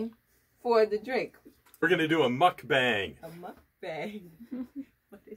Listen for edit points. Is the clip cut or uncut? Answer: cut